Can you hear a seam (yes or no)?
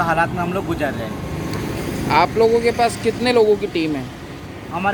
no